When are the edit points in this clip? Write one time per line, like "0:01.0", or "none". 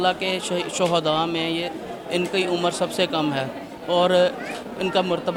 none